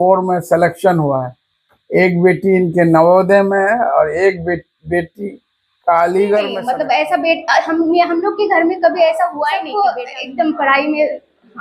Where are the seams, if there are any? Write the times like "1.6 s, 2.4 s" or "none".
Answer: 6.6 s, 9.5 s